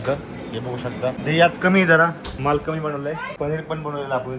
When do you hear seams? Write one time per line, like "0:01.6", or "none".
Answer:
0:01.2
0:03.3